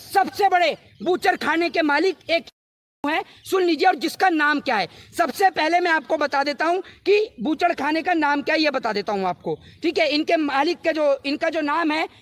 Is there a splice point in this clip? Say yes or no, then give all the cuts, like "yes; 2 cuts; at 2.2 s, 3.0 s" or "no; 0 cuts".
no; 0 cuts